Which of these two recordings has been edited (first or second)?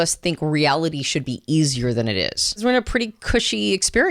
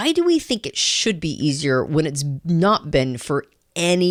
first